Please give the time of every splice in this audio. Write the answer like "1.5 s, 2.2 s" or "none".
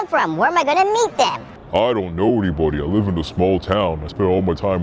1.5 s